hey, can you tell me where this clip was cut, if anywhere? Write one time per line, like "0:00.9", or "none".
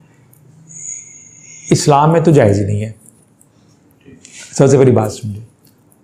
none